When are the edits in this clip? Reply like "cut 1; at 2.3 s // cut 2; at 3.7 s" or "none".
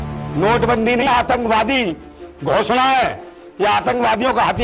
cut 1; at 1.0 s